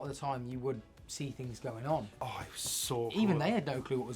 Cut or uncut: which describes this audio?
cut